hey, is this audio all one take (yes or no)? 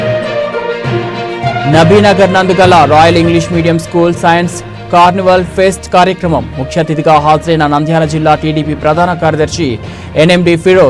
no